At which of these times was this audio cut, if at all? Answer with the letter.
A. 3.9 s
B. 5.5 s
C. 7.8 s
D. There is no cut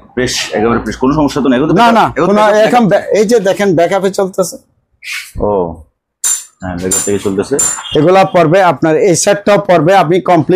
C